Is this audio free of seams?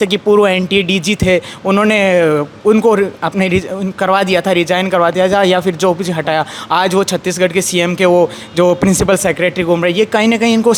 yes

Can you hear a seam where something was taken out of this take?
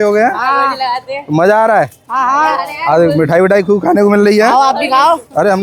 no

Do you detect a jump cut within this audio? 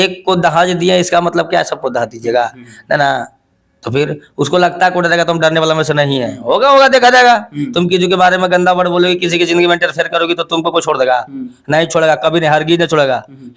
no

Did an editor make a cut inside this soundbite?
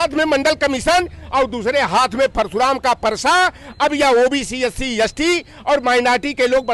no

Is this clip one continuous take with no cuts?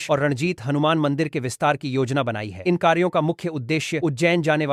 yes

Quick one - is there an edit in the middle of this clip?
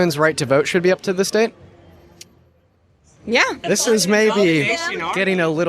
yes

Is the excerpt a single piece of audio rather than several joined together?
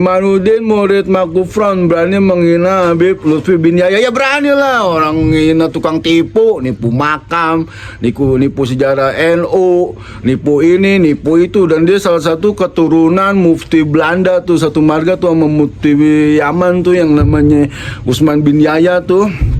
yes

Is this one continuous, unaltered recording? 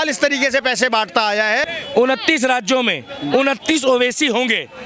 no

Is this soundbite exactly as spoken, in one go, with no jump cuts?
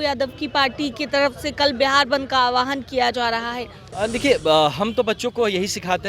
no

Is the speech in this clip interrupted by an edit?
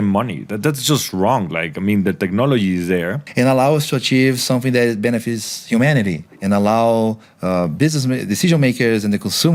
yes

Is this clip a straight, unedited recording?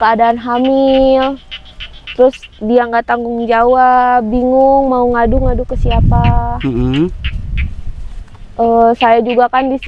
yes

